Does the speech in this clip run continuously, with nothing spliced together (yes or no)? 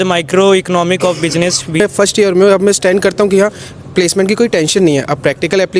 no